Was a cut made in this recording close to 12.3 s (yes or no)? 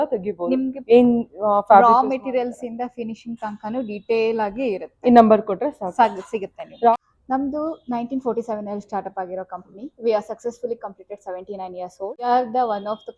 yes